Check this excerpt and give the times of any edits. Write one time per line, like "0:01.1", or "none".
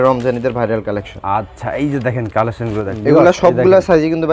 0:03.0